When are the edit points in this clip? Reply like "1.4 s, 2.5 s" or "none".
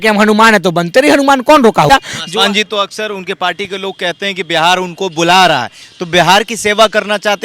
1.9 s